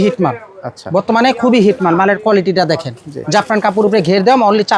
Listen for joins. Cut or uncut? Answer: uncut